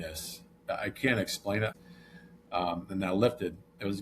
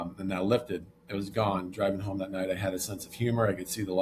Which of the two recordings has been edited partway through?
first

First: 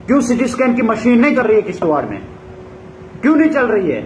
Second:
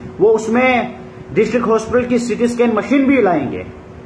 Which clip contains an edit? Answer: first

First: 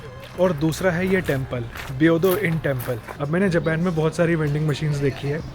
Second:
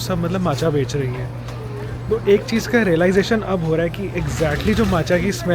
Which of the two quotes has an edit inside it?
first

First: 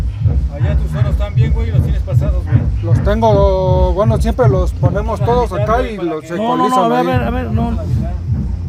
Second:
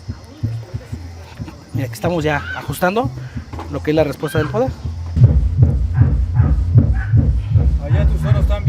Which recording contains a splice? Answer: second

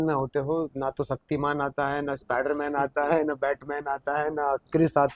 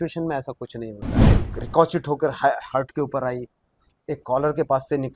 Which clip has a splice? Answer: second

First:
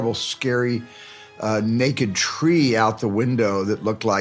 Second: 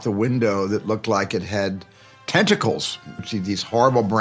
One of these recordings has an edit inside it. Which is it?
second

